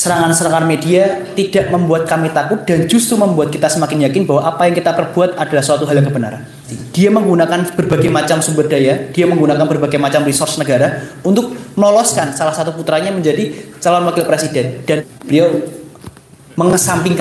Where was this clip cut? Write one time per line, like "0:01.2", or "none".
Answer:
0:06.8
0:15.0